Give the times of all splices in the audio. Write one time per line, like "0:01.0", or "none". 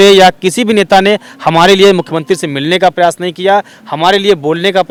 none